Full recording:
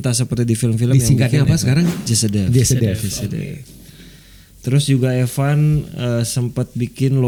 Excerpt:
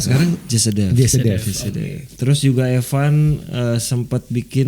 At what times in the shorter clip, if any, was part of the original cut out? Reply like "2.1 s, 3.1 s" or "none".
2.0 s